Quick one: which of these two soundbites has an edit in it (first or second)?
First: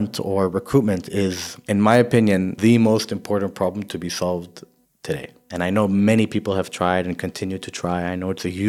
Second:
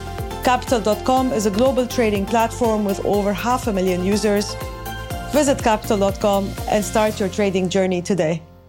first